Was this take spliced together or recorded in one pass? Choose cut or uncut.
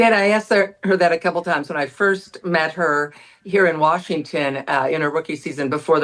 uncut